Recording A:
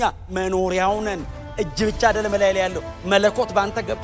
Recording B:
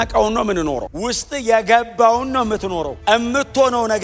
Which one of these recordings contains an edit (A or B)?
B